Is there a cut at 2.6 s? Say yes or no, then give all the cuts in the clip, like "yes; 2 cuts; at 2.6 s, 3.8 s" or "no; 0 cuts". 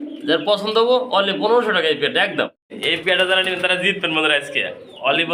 yes; 1 cut; at 2.6 s